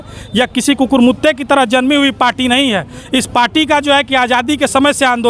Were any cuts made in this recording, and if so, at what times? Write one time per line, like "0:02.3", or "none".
none

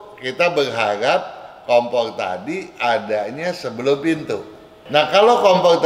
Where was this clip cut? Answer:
0:04.8

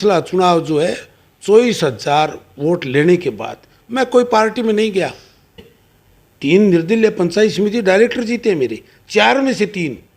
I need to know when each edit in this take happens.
0:05.6

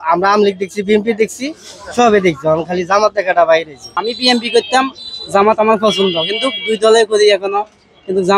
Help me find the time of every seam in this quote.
0:04.0

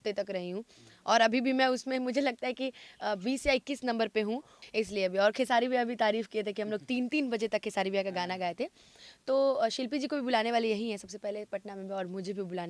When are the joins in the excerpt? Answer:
0:04.5

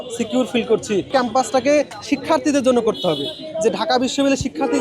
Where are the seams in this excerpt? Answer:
0:01.1

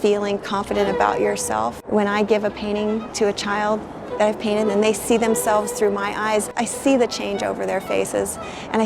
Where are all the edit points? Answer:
0:01.8
0:06.5

